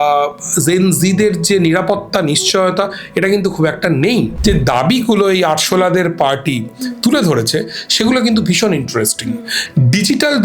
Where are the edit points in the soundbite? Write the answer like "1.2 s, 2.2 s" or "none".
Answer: 4.3 s, 9.5 s